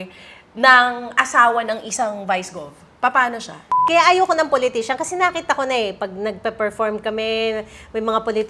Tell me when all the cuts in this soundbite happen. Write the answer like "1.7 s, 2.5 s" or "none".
3.7 s